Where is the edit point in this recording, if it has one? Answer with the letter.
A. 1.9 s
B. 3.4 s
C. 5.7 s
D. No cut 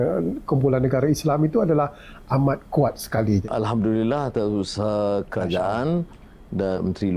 B